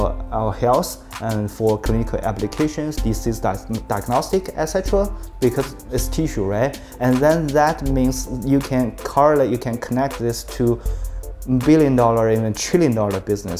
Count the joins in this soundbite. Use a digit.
0